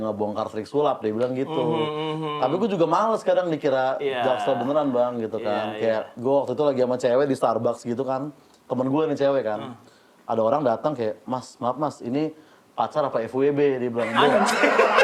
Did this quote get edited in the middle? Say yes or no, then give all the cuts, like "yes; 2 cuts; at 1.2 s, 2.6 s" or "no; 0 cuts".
no; 0 cuts